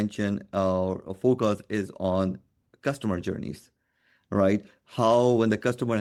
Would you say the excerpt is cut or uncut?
uncut